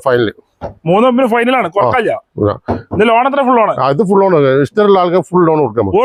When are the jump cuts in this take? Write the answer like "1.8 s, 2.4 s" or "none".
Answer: none